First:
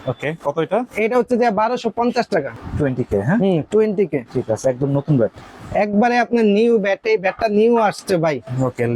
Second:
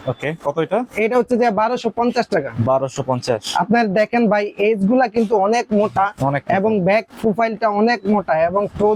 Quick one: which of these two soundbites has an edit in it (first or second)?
first